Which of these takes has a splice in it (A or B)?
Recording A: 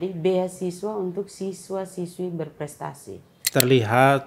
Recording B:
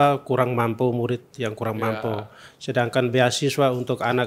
A